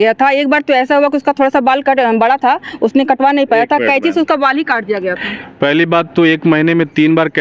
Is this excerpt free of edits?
yes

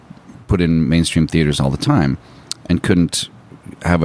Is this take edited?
no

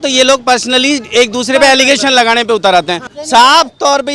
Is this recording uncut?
no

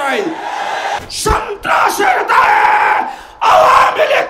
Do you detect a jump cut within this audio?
yes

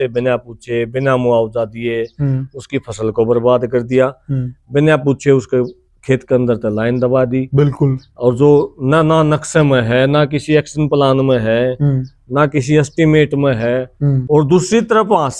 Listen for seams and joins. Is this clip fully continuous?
no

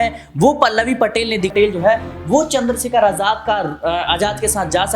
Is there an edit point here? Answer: yes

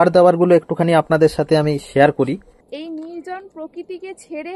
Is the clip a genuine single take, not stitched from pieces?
no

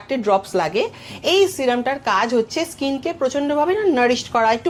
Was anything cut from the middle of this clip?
no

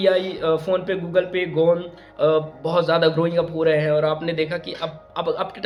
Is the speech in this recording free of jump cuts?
yes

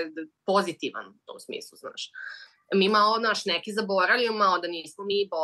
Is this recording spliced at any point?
no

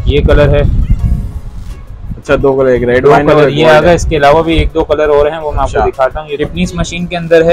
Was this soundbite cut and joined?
yes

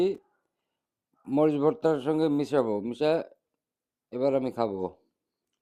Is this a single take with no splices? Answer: yes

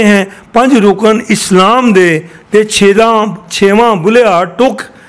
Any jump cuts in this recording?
no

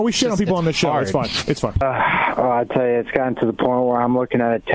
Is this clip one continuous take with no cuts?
no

